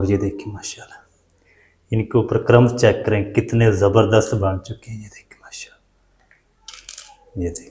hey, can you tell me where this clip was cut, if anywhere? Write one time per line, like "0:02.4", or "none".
none